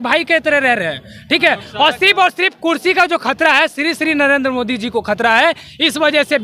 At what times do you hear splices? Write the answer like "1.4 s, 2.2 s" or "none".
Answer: none